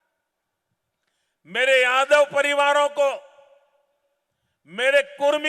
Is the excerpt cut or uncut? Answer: uncut